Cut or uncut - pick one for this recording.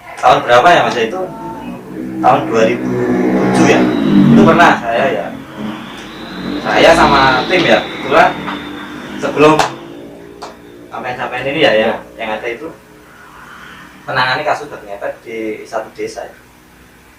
uncut